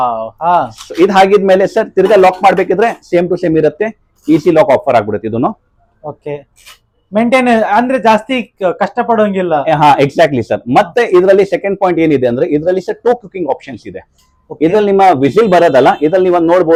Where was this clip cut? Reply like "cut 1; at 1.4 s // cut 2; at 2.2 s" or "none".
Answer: none